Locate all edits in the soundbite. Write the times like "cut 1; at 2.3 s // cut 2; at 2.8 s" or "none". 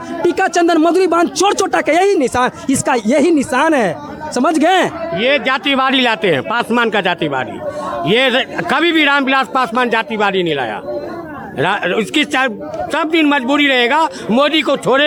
none